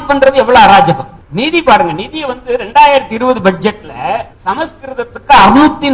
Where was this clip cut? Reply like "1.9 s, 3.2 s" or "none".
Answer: 1.2 s, 4.3 s